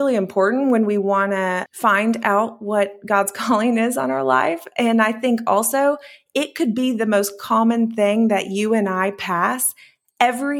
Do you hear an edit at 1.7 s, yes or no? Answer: yes